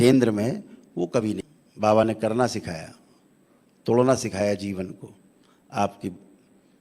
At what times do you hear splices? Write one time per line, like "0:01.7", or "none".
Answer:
0:01.6